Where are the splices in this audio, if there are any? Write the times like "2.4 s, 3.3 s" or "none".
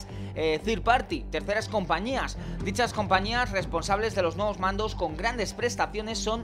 none